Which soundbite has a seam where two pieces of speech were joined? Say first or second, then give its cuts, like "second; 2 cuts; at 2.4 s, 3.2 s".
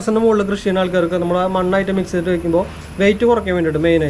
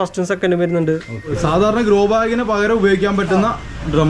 second; 1 cut; at 1.4 s